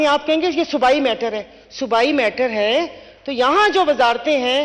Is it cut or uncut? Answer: uncut